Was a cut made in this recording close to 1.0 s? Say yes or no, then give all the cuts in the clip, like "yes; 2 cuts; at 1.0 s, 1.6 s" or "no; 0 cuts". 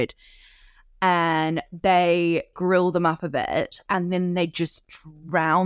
no; 1 cut; at 2.5 s